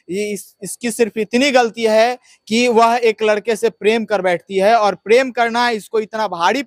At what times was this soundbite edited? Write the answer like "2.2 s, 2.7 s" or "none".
none